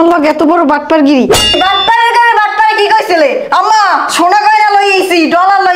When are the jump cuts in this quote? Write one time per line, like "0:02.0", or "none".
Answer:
0:01.5